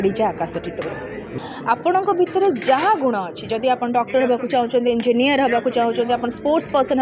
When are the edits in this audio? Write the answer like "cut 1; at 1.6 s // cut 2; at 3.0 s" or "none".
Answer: cut 1; at 1.3 s